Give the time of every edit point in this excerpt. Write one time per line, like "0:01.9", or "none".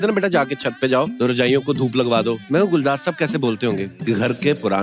0:01.1
0:02.4
0:03.9